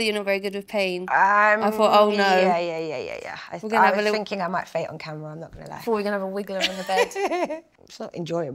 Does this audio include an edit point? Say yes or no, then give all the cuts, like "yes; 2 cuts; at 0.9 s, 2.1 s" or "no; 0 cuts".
no; 0 cuts